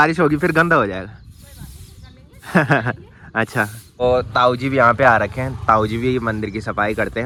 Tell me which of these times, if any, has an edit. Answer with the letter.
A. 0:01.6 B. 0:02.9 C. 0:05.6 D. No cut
D